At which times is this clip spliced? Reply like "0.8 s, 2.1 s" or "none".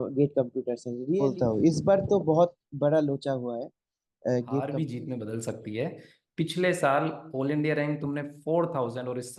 1.0 s, 4.8 s

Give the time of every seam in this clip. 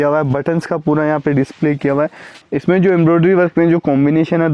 2.3 s

